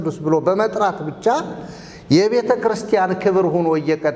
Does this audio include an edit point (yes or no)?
no